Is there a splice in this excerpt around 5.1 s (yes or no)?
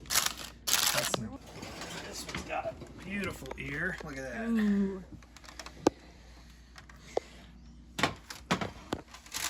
no